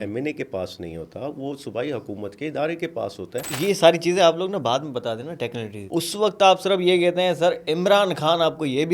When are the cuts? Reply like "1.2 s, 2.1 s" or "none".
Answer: 3.5 s, 5.8 s